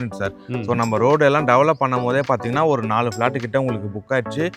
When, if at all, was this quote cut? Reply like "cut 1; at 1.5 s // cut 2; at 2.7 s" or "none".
none